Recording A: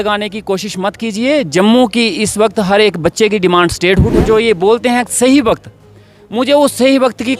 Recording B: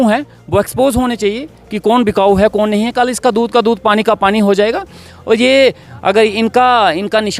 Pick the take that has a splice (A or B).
A